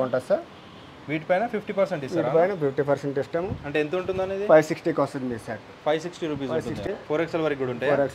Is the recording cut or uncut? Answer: cut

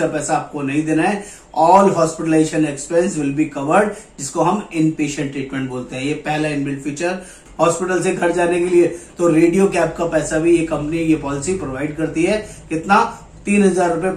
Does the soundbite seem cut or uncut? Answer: cut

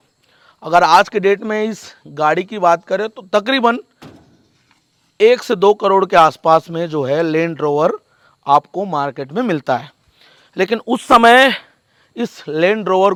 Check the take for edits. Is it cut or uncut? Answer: uncut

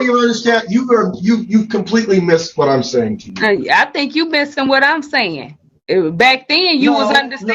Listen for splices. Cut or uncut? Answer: uncut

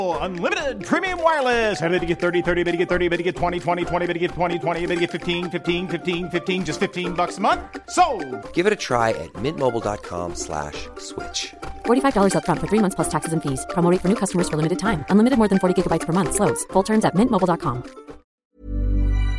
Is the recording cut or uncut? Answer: cut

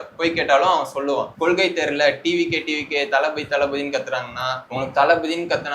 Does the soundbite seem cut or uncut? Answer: cut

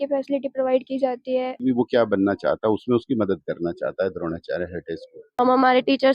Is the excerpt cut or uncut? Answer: cut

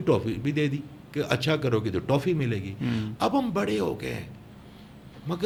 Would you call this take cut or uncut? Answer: uncut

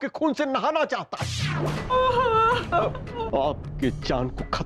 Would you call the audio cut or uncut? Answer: uncut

